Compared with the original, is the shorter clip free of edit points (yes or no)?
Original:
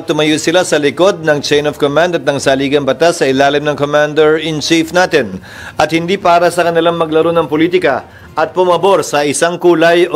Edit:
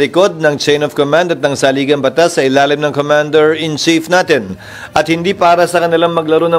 yes